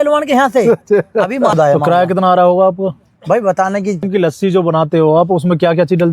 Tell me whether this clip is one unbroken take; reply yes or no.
no